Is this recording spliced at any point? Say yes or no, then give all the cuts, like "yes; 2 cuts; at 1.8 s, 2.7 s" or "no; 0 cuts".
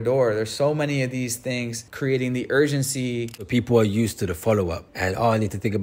yes; 3 cuts; at 1.8 s, 3.5 s, 4.9 s